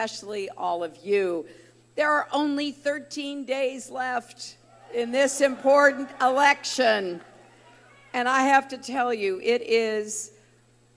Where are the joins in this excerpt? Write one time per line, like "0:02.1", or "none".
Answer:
none